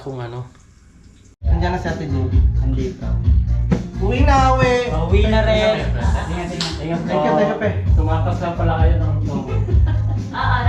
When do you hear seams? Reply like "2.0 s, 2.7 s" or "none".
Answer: 1.4 s

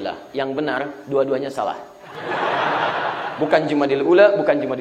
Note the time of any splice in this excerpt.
none

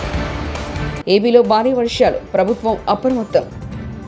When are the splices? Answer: 0.9 s

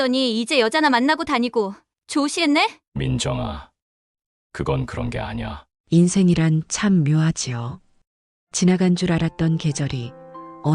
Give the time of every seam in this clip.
2.9 s, 5.7 s

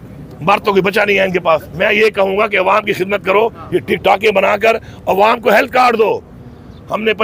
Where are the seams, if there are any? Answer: none

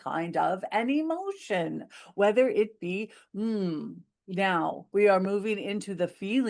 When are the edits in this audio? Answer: none

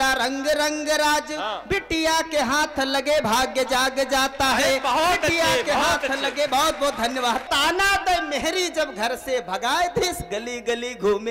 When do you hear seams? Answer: 7.5 s

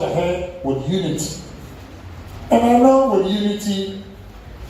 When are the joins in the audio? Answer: none

